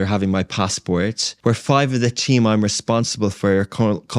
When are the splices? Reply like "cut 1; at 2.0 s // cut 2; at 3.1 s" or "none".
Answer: cut 1; at 1.3 s